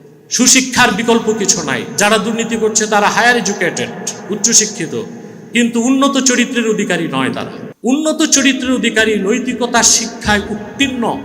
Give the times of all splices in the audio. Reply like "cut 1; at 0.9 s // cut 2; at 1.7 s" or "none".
cut 1; at 7.6 s